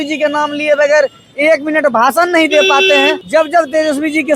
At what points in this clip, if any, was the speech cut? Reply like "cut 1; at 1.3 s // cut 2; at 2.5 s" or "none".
cut 1; at 3.2 s